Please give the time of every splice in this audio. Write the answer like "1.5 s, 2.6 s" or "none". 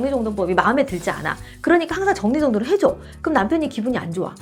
none